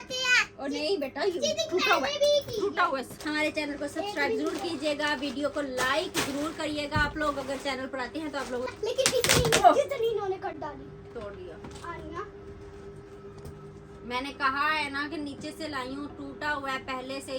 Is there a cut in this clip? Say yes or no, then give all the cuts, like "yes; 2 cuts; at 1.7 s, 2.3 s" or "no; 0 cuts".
yes; 2 cuts; at 3.1 s, 8.7 s